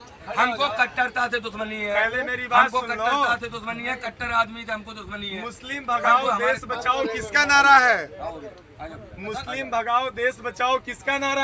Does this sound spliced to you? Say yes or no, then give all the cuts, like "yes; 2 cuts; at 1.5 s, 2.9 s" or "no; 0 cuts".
no; 0 cuts